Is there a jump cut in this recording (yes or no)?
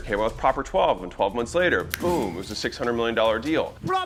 no